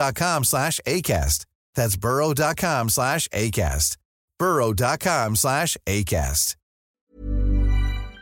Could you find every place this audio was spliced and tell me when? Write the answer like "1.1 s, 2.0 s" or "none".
7.0 s